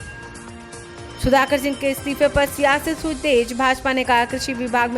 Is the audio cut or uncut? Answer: uncut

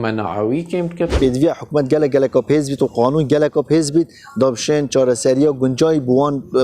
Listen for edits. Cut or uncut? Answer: cut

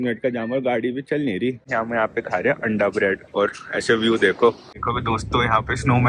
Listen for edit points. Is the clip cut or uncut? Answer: cut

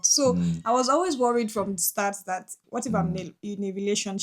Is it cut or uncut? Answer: cut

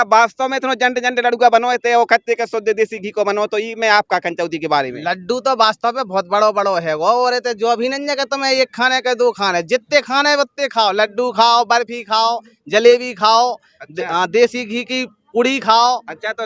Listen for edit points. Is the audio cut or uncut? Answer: uncut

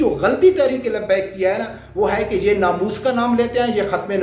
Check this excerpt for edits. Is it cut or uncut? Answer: uncut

